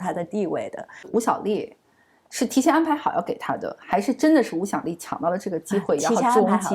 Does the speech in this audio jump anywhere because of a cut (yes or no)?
yes